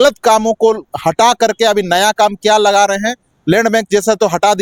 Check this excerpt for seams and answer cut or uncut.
uncut